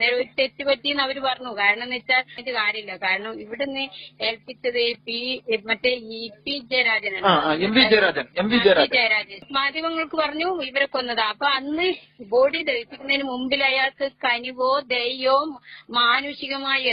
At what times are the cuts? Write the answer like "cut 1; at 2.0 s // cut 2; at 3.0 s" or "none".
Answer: cut 1; at 2.3 s // cut 2; at 9.4 s

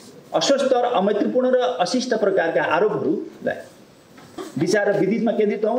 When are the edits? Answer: cut 1; at 4.4 s

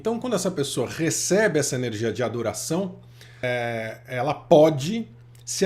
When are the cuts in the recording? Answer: cut 1; at 3.4 s

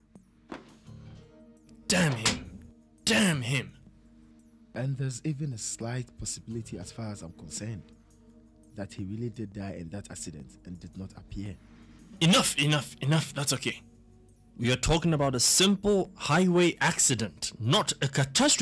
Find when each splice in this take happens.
none

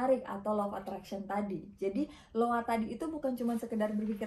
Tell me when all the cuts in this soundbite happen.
none

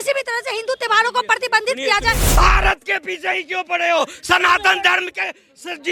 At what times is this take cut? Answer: cut 1; at 2.3 s

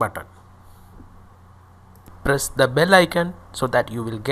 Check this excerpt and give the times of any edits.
cut 1; at 2.1 s

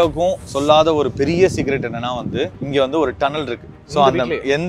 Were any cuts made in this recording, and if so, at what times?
cut 1; at 2.6 s

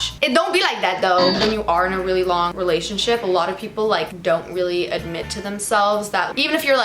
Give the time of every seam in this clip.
cut 1; at 1.4 s // cut 2; at 2.5 s // cut 3; at 4.1 s

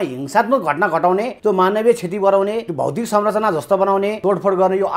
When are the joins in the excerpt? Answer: cut 1; at 1.3 s // cut 2; at 2.7 s // cut 3; at 4.2 s

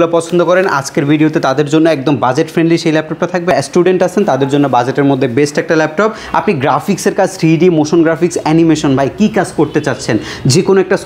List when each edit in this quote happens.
cut 1; at 3.5 s // cut 2; at 6.2 s

